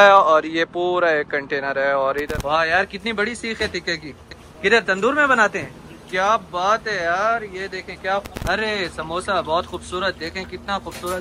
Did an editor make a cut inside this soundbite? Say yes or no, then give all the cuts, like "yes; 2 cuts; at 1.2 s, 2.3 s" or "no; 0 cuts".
yes; 2 cuts; at 2.3 s, 8.3 s